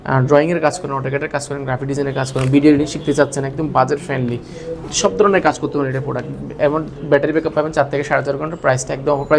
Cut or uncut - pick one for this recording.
uncut